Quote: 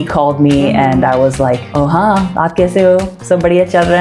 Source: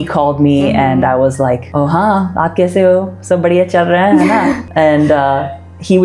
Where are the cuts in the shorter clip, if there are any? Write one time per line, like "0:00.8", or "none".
none